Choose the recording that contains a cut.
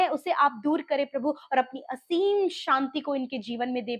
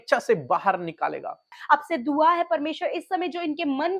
second; 1 cut; at 1.5 s

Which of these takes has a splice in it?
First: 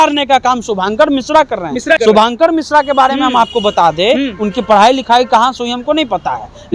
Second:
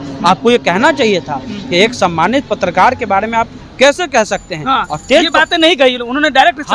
first; 1 cut; at 2.0 s

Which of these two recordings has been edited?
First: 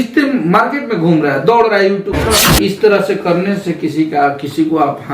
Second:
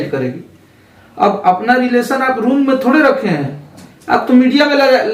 first; 1 cut; at 2.5 s

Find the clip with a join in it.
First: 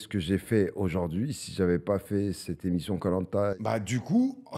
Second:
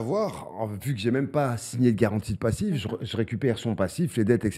first; 1 cut; at 3.5 s

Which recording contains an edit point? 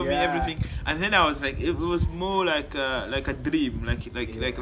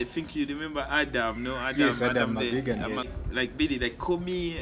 second; 1 cut; at 3.1 s

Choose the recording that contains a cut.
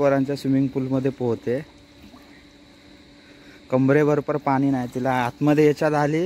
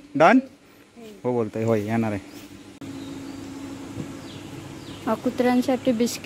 second; 1 cut; at 2.7 s

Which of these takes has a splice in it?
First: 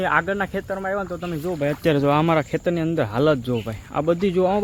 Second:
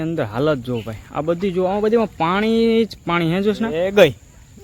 second; 1 cut; at 3.7 s

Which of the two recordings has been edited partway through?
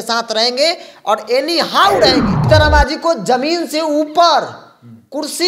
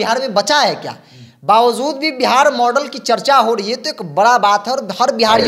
first; 1 cut; at 2.4 s

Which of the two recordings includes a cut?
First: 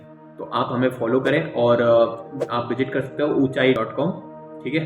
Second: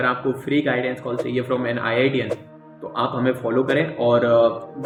first; 1 cut; at 3.8 s

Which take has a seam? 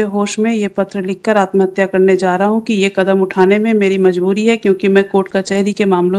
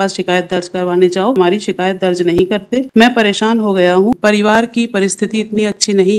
second; 3 cuts; at 1.4 s, 2.9 s, 4.1 s

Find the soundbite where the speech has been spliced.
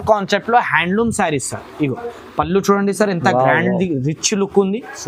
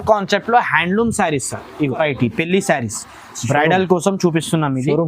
second; 1 cut; at 2.0 s

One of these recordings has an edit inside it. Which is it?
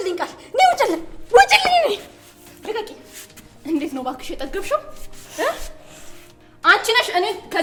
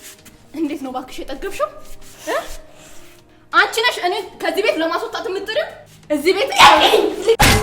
second; 1 cut; at 6.5 s

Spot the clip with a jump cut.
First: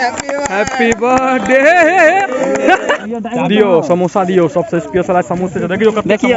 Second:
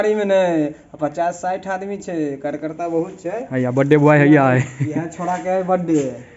first; 1 cut; at 3.0 s

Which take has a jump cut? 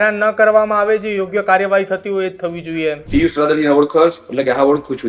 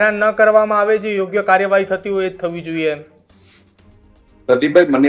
first; 1 cut; at 3.0 s

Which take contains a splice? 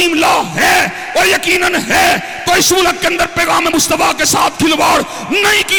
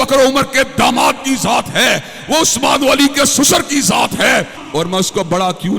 second; 1 cut; at 4.6 s

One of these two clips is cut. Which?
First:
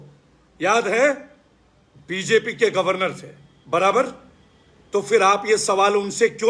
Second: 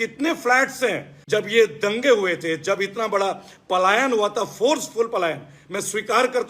second; 1 cut; at 1.1 s

